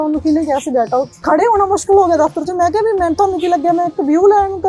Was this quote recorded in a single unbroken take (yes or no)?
no